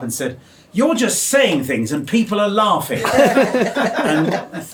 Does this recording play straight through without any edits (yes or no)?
yes